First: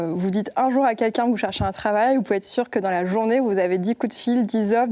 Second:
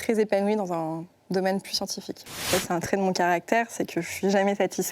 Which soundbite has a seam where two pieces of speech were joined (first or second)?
second